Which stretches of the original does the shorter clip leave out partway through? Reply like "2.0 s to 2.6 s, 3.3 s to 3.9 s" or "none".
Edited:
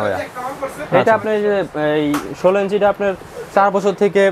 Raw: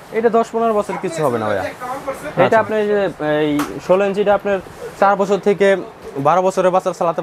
none